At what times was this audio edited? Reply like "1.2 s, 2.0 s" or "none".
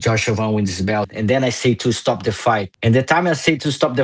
1.1 s, 2.7 s